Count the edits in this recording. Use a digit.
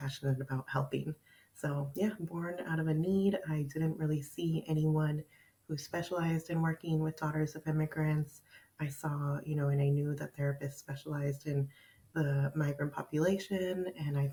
0